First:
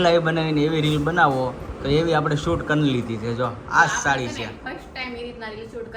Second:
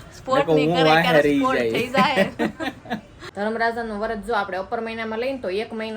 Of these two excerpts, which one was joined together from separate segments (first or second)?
second